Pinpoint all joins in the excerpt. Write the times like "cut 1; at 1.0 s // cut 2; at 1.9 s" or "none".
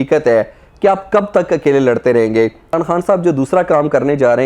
cut 1; at 2.8 s